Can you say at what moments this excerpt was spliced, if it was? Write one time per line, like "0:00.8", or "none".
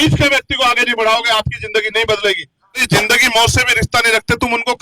0:02.8